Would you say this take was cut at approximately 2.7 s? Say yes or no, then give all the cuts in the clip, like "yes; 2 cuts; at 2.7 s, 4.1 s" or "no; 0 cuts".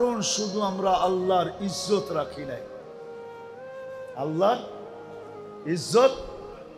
yes; 2 cuts; at 2.7 s, 4.1 s